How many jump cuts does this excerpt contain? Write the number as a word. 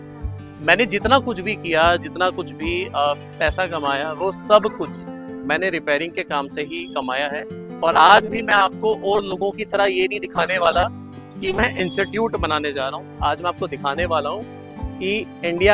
zero